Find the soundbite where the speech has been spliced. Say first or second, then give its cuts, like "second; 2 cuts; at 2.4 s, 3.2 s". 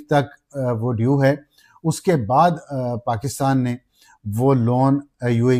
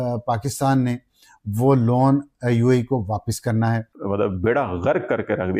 second; 1 cut; at 3.9 s